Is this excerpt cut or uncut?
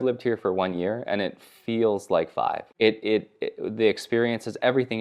uncut